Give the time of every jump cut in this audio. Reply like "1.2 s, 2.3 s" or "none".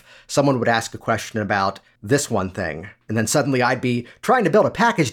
1.9 s